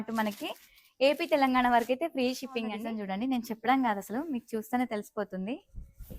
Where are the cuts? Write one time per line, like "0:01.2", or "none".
0:02.9